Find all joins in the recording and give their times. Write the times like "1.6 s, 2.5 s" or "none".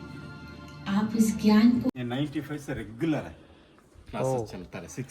1.9 s